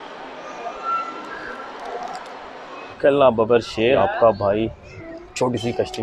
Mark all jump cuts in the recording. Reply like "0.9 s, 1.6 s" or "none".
2.9 s, 4.0 s